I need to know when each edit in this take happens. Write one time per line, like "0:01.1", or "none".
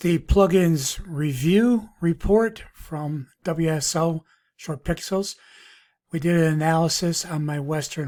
none